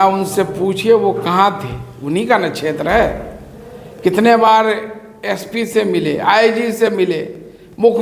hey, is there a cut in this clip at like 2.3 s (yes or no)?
no